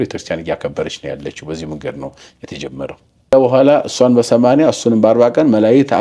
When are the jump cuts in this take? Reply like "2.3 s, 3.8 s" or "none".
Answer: 3.3 s